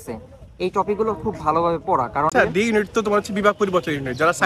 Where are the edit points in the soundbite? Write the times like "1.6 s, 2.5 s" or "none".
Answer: 2.3 s